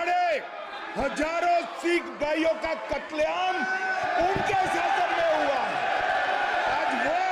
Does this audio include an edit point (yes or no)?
no